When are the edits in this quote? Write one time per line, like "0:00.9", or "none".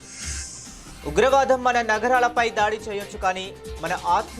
0:01.0